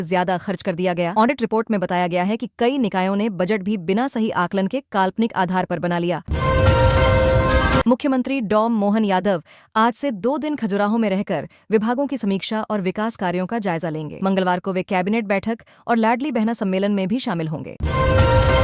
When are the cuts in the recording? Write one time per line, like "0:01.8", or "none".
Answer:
0:06.3
0:07.8
0:17.8